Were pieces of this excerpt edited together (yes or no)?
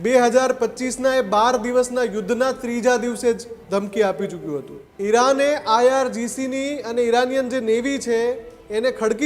yes